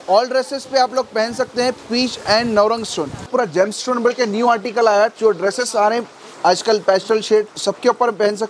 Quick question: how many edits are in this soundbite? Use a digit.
3